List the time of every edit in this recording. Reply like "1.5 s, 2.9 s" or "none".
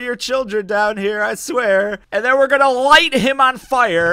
2.0 s